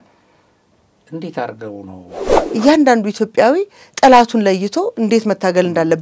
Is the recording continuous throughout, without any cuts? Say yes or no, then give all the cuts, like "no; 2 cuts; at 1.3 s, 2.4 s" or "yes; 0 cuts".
no; 1 cut; at 2.4 s